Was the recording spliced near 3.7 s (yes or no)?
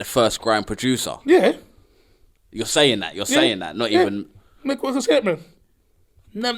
no